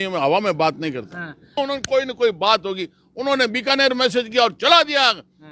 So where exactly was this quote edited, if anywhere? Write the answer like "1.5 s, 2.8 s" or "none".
1.5 s